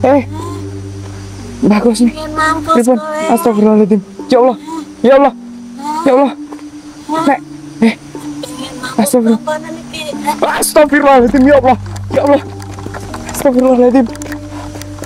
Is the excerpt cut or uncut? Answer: uncut